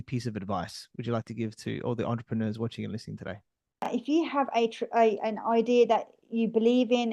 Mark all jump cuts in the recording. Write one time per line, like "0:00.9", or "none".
0:03.9